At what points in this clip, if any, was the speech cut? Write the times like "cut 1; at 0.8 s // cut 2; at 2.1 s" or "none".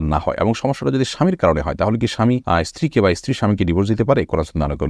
cut 1; at 2.4 s